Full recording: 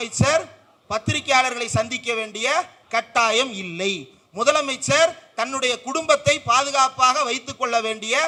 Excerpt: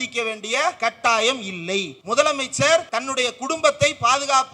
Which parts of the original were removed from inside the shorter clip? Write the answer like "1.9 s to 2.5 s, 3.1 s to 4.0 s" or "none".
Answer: 2.7 s to 2.9 s, 4.1 s to 4.2 s, 5.2 s to 5.4 s